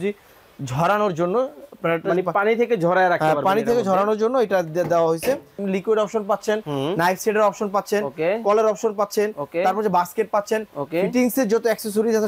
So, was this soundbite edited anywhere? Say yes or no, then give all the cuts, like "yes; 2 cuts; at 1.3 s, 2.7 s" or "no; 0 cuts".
yes; 1 cut; at 5.6 s